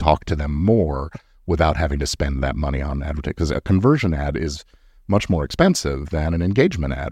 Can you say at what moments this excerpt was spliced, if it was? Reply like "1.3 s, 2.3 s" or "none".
none